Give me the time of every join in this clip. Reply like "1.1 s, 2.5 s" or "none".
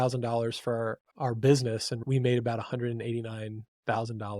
1.0 s